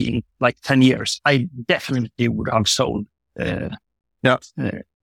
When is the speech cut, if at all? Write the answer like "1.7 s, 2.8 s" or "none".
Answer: none